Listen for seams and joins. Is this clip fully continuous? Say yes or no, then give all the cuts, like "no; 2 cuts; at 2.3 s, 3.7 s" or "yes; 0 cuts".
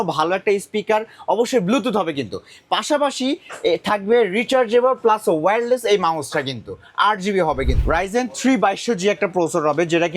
no; 1 cut; at 7.8 s